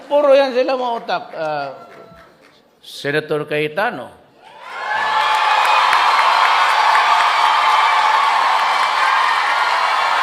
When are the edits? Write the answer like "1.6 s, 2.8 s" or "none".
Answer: none